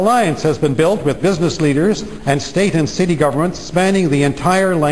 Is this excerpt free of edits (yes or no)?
yes